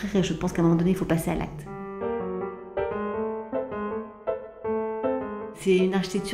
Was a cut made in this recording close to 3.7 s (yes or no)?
no